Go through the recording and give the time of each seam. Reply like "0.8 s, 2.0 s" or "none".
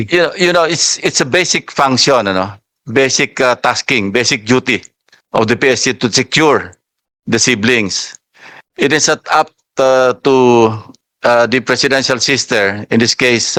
none

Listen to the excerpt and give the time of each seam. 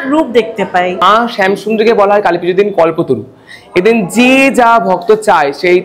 1.0 s

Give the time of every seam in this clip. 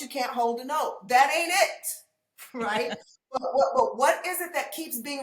none

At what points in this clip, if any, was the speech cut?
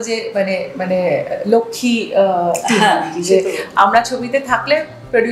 none

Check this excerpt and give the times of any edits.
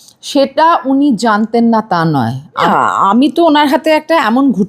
2.6 s

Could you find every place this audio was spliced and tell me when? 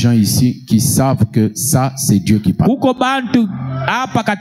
none

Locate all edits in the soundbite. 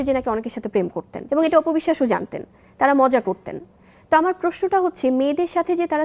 1.1 s

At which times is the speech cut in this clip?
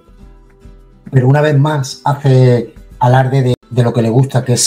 3.6 s

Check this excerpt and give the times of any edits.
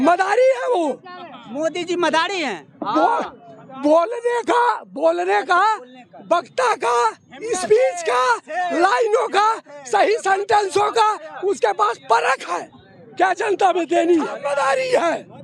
14.4 s

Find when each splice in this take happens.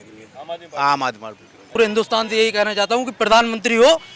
1.7 s

